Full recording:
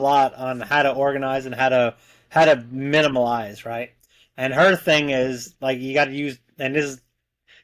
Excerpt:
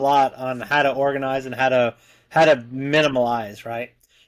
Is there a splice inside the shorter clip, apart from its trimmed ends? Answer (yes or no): no